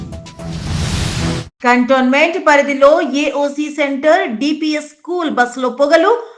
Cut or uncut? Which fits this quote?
uncut